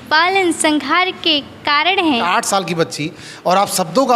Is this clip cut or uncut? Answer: cut